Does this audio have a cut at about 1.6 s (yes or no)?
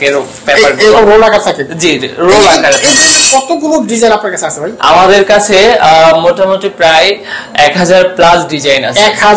no